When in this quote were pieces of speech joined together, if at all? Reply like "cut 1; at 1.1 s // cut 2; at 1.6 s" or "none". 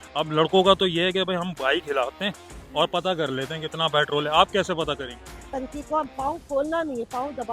cut 1; at 5.5 s